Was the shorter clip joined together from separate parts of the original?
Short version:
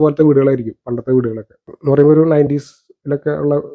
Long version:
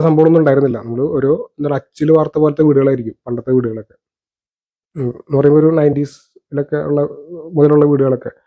yes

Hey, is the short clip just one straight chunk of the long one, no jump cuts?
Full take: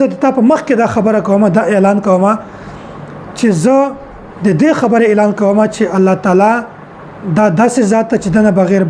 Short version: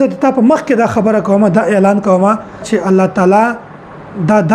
no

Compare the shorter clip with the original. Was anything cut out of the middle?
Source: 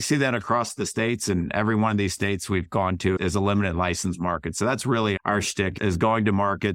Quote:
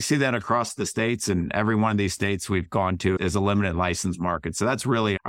no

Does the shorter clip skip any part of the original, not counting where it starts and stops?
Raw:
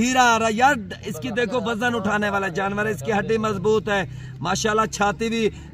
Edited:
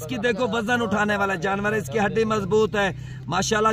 no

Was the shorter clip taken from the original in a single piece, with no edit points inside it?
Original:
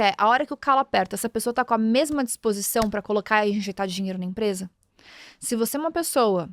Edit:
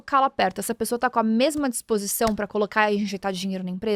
yes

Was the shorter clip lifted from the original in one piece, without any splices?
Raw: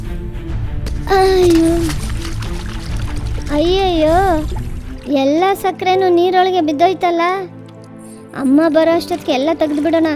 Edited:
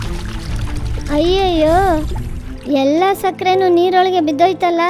yes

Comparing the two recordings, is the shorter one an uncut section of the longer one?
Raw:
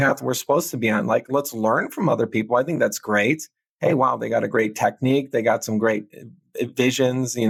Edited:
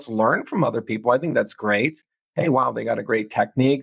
yes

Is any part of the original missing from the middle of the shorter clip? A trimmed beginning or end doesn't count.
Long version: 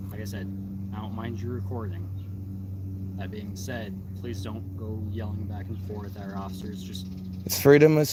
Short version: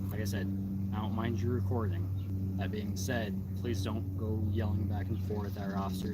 yes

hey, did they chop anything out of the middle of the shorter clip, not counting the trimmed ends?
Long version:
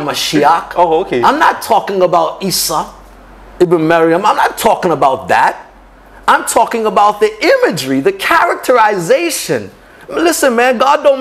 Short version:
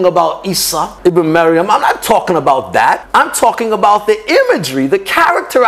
yes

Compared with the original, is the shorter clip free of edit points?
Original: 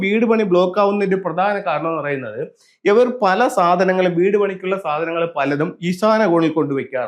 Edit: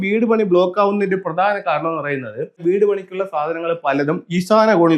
no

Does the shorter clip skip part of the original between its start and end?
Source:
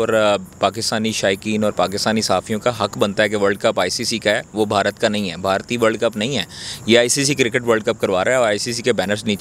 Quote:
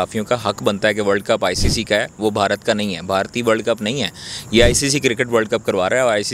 no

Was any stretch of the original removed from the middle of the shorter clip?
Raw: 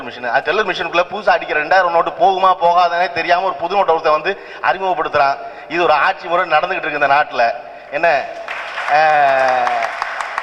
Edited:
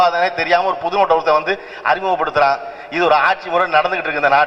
no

